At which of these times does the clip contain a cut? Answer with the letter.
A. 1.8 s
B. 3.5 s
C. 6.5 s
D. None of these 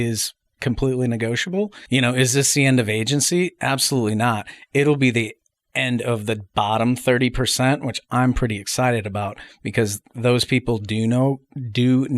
A